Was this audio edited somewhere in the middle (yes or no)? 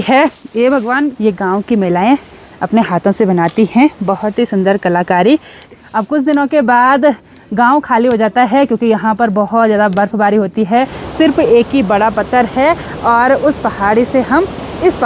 yes